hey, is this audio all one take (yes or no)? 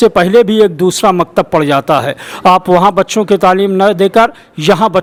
yes